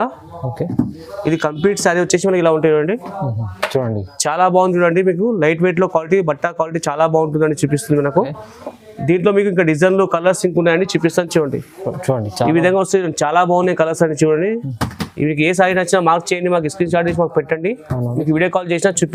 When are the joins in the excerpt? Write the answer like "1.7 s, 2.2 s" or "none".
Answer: none